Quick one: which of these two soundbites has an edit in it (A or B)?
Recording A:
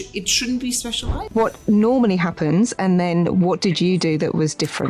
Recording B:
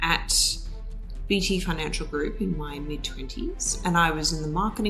A